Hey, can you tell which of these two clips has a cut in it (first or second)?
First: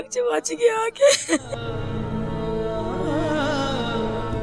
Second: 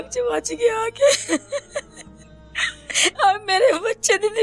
second